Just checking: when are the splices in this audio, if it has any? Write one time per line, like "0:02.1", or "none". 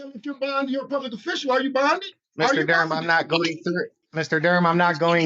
0:02.2
0:04.0

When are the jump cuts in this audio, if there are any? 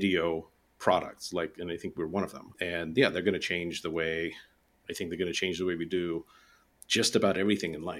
0:02.5

